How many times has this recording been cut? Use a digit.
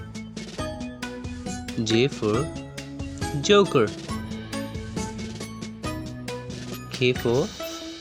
4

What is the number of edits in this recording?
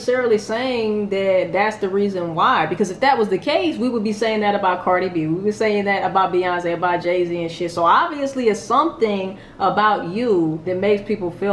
1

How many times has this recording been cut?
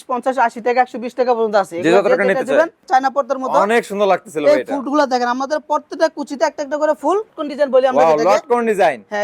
2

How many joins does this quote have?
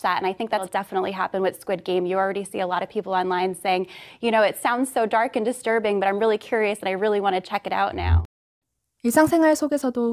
0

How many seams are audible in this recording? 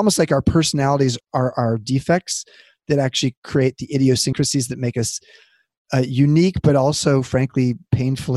1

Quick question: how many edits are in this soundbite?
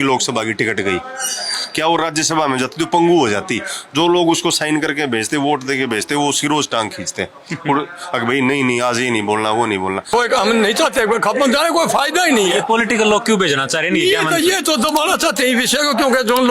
1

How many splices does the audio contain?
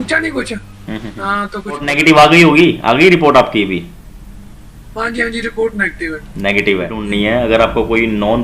2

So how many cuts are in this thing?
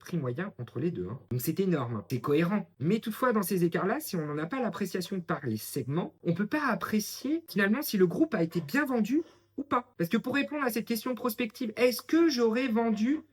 2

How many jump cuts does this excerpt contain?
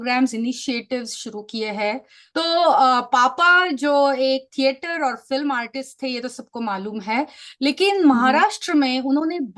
1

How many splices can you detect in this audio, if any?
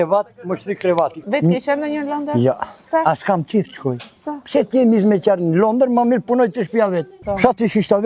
2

